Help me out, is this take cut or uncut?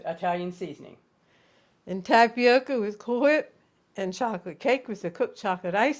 uncut